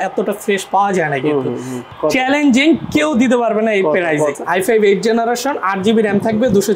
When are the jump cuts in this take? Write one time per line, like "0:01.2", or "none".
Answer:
0:01.9
0:04.3